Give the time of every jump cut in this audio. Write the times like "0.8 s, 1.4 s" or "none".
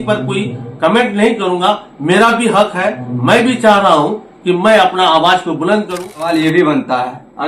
6.3 s